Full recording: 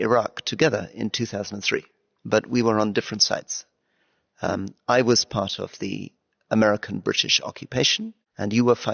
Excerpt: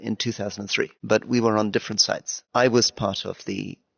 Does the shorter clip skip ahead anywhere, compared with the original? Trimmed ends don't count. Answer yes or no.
yes